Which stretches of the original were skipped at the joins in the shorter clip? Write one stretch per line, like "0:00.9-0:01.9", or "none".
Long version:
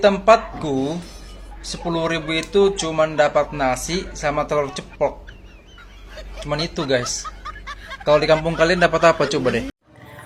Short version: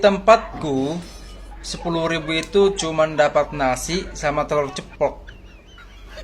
none